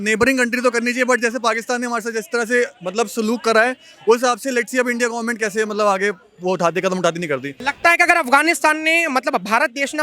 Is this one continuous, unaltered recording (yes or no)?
no